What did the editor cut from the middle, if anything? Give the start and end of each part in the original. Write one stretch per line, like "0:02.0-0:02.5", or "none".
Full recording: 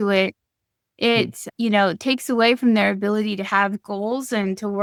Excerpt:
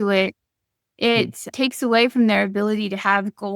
0:01.5-0:02.0